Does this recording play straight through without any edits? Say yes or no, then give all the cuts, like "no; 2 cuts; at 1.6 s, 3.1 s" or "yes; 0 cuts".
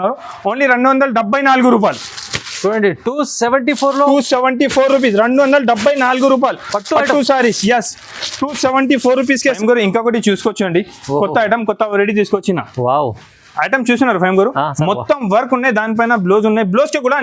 no; 1 cut; at 9.6 s